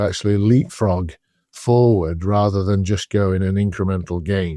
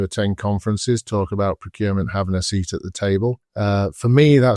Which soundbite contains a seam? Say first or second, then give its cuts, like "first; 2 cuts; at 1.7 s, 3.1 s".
second; 1 cut; at 3.5 s